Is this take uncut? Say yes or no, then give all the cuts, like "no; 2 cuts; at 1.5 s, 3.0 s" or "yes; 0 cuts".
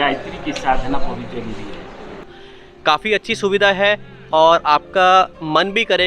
no; 1 cut; at 2.2 s